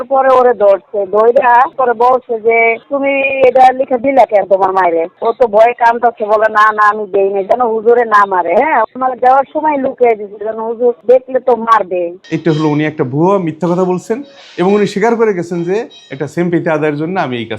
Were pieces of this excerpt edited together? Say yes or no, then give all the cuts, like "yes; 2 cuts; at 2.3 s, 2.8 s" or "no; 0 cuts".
yes; 3 cuts; at 2.8 s, 5.2 s, 12.2 s